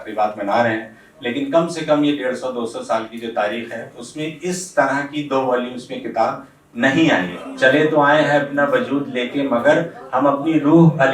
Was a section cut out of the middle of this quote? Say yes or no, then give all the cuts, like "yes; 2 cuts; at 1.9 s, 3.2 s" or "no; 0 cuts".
yes; 1 cut; at 7.4 s